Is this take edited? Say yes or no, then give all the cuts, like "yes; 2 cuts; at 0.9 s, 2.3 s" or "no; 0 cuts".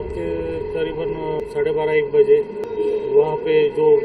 yes; 2 cuts; at 1.4 s, 2.6 s